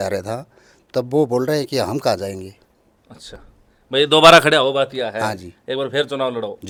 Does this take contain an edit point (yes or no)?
no